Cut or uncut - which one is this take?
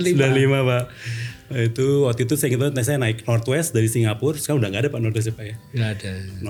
uncut